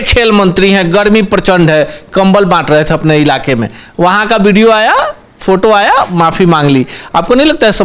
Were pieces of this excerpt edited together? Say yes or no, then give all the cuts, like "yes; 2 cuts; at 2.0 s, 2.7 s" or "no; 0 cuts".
no; 0 cuts